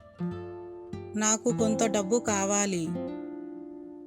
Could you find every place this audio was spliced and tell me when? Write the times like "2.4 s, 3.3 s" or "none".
1.1 s